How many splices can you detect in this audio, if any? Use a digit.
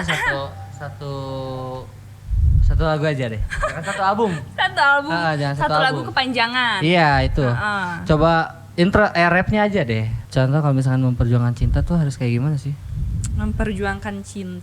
1